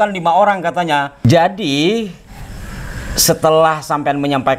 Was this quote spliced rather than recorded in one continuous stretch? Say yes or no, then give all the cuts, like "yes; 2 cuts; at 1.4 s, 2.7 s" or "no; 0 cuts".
no; 0 cuts